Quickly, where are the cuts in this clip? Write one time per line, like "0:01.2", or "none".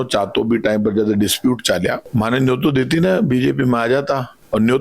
0:02.0